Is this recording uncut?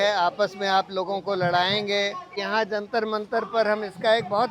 no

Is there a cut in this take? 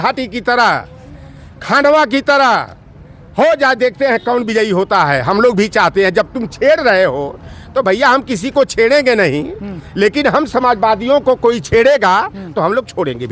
no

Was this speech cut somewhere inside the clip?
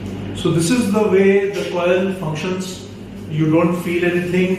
no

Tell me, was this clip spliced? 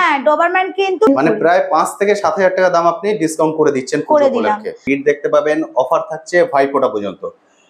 yes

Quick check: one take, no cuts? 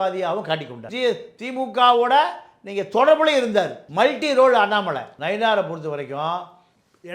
no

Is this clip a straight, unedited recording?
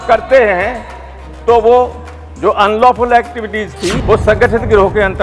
no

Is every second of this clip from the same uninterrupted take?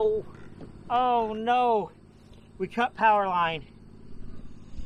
yes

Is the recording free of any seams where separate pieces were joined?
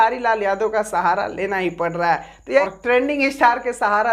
no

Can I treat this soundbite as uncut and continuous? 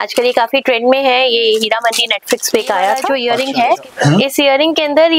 no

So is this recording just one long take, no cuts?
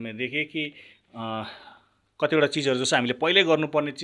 yes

